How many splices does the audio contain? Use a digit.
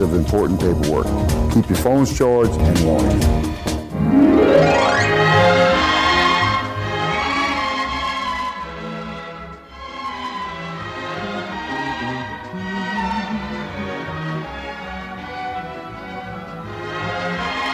1